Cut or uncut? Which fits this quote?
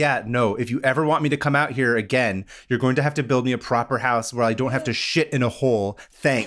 uncut